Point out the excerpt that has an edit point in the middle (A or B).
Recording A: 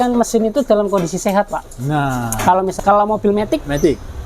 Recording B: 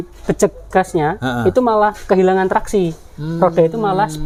A